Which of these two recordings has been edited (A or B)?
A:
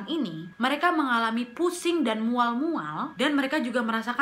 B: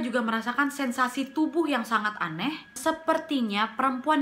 B